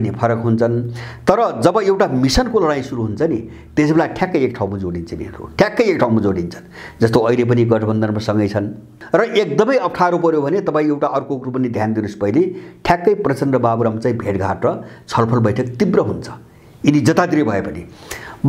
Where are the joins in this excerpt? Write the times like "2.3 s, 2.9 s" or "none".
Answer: 9.0 s